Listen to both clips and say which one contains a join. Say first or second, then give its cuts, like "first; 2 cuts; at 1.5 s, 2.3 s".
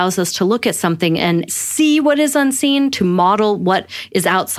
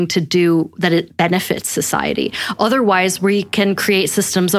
first; 1 cut; at 1.5 s